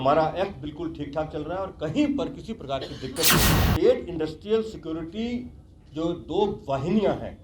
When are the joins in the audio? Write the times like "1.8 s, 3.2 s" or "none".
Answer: 3.6 s